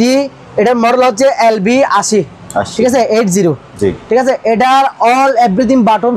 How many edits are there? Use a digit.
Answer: 0